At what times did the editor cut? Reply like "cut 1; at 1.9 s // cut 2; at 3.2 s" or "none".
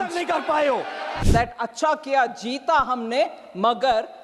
cut 1; at 1.2 s